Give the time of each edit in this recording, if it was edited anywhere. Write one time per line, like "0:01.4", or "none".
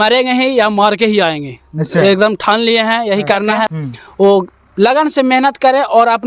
0:03.7